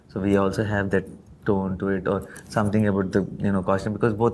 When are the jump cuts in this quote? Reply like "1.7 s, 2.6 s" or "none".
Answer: none